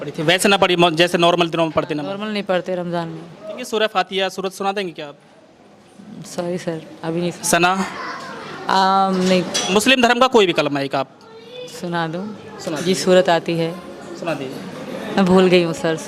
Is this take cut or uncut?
cut